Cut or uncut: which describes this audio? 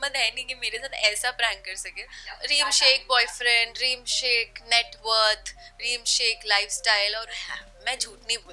cut